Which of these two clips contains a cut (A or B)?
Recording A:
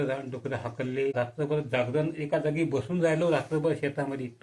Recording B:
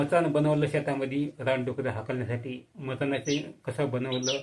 A